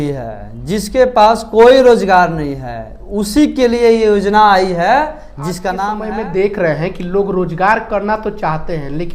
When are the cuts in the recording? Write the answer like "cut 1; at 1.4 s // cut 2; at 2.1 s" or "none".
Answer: cut 1; at 6.0 s